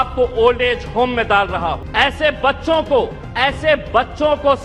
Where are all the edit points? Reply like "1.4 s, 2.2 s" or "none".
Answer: 1.8 s, 3.2 s